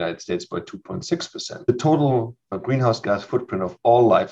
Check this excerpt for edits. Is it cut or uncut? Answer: cut